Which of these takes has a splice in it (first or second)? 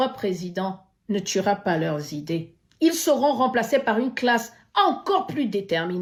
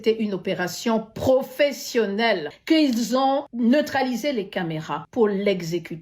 second